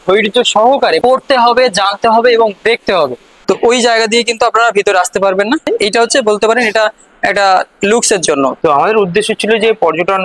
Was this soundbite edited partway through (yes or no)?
yes